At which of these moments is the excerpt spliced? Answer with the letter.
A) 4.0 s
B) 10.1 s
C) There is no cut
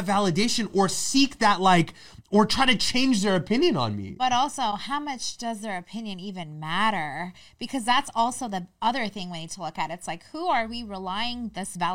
C